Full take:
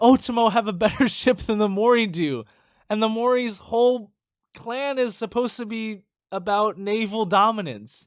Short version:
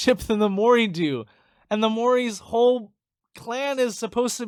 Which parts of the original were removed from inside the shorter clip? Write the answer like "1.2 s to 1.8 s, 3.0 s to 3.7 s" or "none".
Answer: none